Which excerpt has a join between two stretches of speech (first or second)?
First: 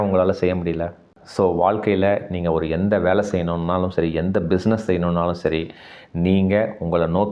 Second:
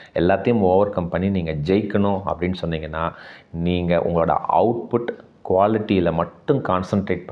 first